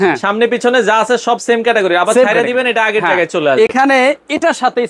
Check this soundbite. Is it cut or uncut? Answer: uncut